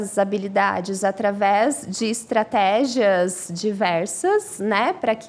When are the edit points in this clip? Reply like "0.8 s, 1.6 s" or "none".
none